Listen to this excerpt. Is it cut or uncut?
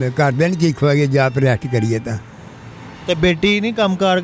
uncut